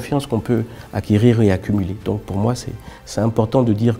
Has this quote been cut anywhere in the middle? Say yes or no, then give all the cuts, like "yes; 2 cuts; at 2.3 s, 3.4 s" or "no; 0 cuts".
no; 0 cuts